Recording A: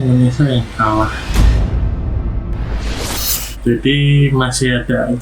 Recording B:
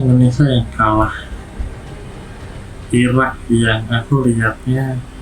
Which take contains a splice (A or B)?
A